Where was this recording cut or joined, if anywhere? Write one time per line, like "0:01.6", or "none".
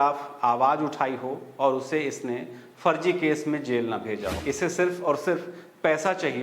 0:04.3